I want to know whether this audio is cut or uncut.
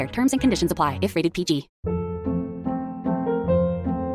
cut